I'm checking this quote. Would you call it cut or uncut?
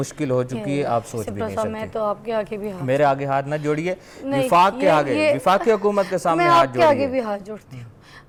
uncut